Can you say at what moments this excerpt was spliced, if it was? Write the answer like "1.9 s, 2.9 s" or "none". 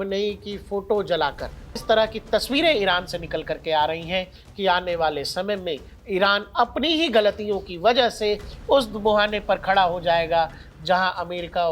1.7 s, 4.4 s

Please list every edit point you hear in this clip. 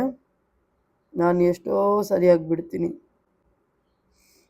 none

